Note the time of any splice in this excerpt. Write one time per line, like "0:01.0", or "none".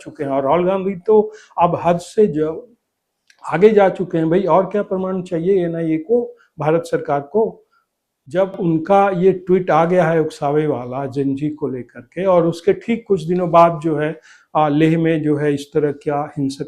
none